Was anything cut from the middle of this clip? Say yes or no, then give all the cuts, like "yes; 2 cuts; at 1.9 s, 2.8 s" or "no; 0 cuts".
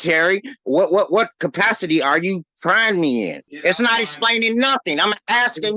yes; 1 cut; at 3.5 s